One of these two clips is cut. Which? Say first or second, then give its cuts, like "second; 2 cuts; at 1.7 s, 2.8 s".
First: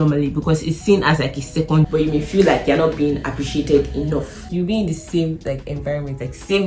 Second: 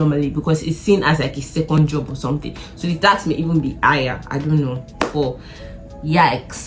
first; 2 cuts; at 1.8 s, 4.5 s